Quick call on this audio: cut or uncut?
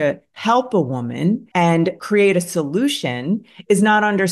cut